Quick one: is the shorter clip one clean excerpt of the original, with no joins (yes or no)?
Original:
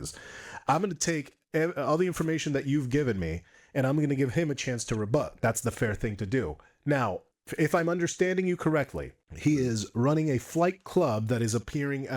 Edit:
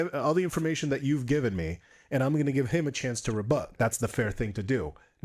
yes